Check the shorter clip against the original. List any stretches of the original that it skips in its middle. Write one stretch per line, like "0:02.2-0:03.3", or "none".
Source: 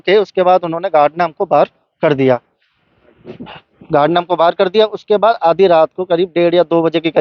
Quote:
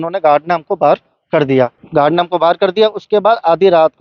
0:02.5-0:03.8